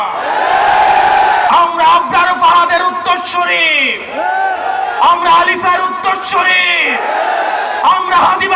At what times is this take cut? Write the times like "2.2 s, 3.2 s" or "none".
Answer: 1.5 s